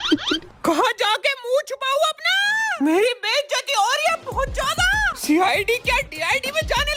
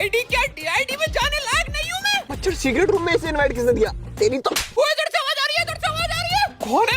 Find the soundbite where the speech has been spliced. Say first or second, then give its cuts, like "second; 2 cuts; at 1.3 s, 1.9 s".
second; 2 cuts; at 2.3 s, 4.8 s